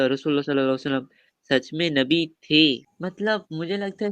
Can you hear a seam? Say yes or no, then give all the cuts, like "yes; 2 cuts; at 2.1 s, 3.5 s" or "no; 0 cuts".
yes; 1 cut; at 2.9 s